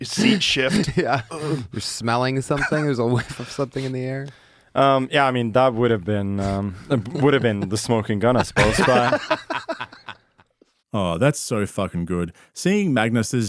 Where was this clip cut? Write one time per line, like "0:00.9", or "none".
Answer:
none